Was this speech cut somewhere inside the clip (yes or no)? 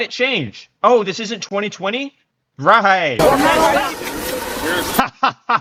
no